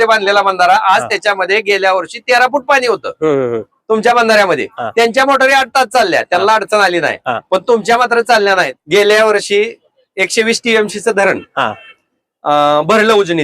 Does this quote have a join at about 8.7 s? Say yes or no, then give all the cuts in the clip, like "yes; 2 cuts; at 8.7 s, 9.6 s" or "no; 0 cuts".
yes; 1 cut; at 8.7 s